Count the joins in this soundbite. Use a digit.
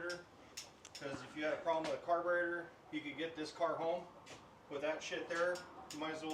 0